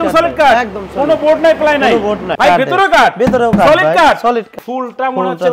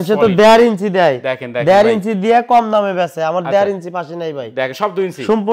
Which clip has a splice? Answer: first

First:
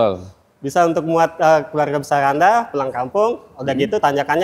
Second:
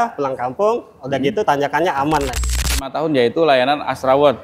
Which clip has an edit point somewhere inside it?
second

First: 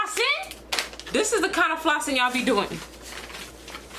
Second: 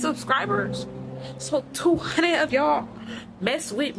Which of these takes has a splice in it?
first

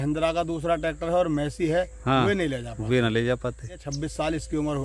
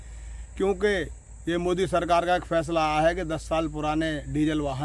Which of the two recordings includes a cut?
first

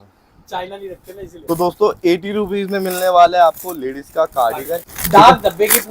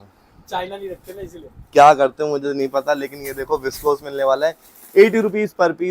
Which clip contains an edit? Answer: first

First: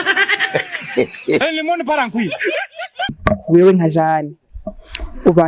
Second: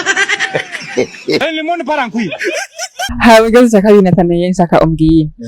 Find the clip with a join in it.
second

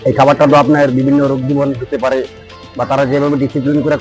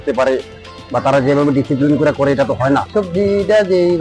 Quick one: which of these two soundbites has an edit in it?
second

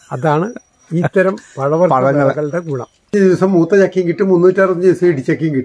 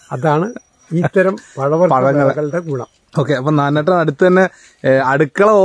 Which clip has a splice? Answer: first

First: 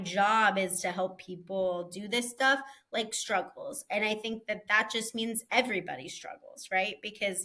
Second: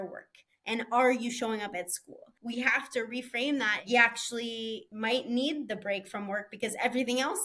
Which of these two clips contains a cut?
second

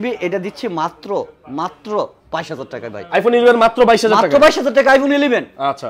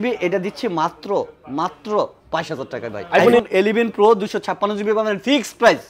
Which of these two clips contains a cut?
second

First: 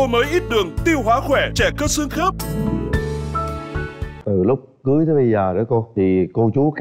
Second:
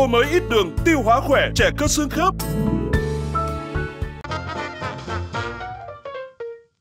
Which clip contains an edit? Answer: second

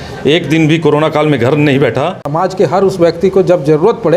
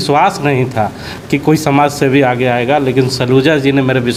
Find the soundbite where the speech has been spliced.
first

